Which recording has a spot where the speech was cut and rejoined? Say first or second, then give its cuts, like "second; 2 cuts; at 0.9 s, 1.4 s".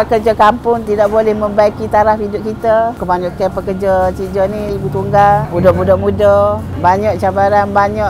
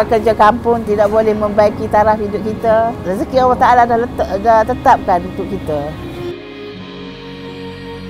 first; 2 cuts; at 3.0 s, 6.7 s